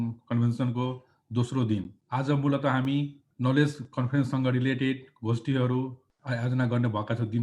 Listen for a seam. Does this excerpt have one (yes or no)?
yes